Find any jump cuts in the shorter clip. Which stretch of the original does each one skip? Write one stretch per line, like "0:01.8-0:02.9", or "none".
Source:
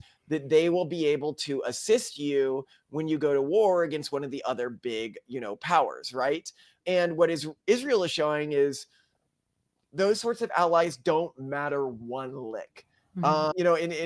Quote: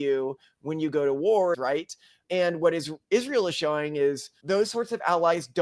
0:03.9-0:06.1
0:08.9-0:09.8